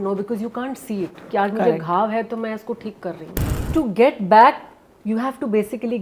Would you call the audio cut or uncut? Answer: cut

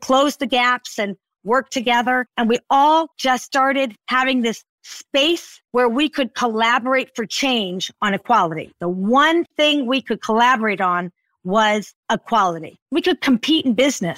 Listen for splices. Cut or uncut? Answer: uncut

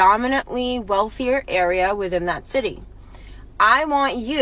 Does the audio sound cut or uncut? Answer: uncut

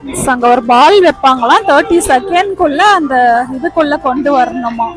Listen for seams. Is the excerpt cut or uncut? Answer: uncut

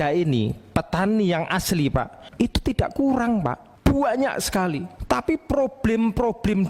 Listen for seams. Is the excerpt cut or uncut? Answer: cut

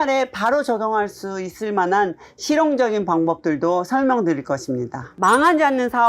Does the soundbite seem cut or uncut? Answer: cut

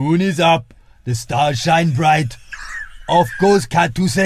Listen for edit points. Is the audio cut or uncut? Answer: uncut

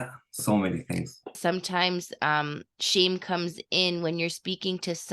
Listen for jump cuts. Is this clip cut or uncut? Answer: cut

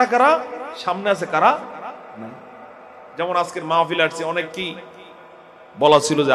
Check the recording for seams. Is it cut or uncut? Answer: uncut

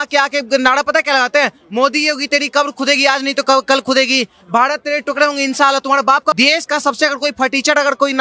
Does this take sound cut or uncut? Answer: cut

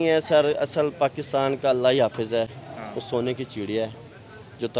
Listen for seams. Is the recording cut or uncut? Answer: uncut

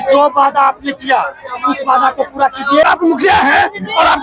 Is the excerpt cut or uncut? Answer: cut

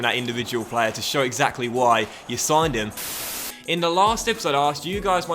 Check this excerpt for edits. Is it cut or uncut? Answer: cut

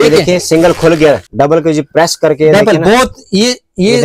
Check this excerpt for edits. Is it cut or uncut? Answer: cut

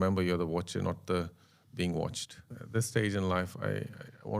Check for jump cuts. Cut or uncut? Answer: cut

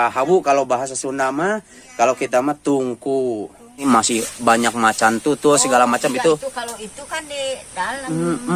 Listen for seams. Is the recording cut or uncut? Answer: cut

